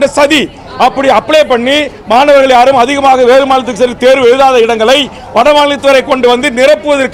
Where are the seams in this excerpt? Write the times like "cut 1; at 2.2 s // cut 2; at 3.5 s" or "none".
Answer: none